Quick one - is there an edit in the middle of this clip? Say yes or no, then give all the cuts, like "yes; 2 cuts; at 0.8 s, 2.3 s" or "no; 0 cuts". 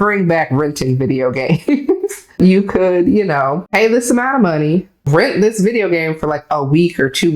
yes; 3 cuts; at 2.4 s, 3.6 s, 5.0 s